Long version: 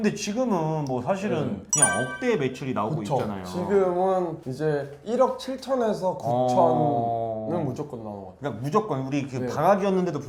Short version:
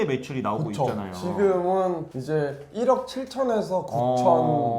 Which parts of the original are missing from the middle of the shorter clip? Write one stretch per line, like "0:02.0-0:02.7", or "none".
none